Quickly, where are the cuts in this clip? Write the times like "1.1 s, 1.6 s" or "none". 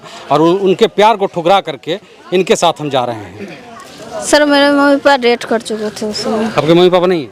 none